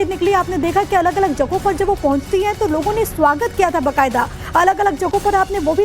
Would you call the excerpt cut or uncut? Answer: cut